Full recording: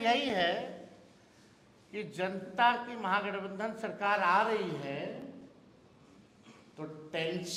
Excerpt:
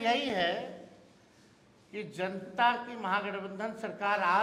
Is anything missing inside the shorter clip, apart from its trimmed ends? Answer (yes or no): no